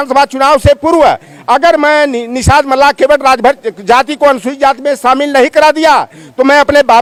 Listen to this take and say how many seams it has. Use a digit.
0